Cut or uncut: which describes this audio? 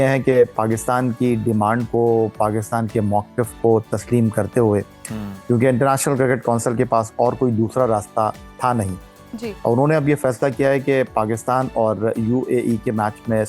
uncut